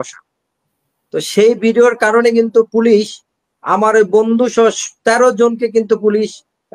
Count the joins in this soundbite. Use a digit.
0